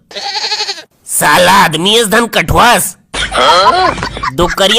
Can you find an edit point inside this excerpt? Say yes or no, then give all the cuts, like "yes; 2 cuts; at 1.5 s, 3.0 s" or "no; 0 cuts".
yes; 1 cut; at 3.0 s